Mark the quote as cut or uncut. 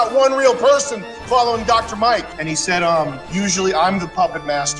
cut